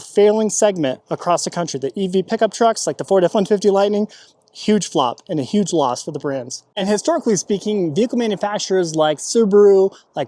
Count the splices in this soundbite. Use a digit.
0